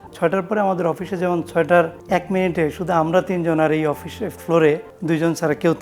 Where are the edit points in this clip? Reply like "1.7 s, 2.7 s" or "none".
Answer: 2.0 s, 4.9 s